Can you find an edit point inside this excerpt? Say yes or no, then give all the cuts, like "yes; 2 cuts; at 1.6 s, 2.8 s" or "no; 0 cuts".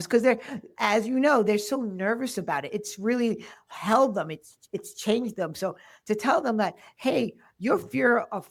no; 0 cuts